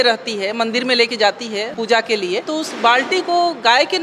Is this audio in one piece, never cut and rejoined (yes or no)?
no